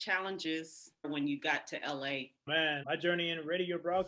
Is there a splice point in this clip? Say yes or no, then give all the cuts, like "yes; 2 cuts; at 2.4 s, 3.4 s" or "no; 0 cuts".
yes; 2 cuts; at 1.0 s, 2.8 s